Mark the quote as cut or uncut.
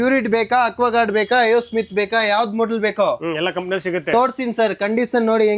uncut